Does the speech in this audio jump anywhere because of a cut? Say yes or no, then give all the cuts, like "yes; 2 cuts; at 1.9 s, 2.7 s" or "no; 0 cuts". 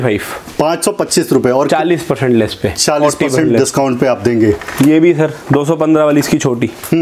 no; 0 cuts